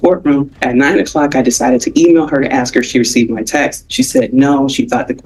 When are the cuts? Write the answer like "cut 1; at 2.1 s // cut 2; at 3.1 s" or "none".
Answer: none

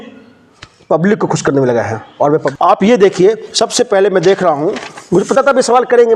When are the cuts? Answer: cut 1; at 2.5 s

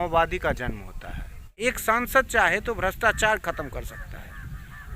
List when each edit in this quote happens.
cut 1; at 1.5 s

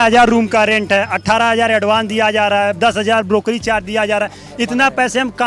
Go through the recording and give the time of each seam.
none

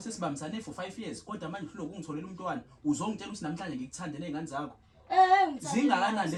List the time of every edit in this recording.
none

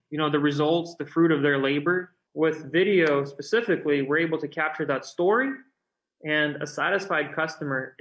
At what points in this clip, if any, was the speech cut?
cut 1; at 2.2 s

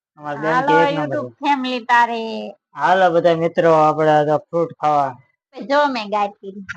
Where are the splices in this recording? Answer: cut 1; at 5.6 s

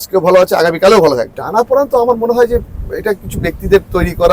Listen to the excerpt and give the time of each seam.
cut 1; at 1.4 s

